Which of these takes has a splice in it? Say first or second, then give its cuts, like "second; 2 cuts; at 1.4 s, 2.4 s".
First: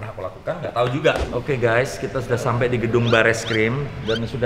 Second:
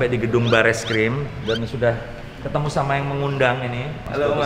first; 1 cut; at 1.3 s